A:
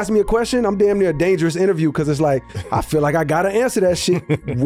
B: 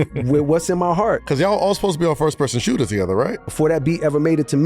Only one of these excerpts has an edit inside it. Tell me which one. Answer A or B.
B